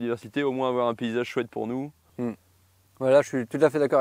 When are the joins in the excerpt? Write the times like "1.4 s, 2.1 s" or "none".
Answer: none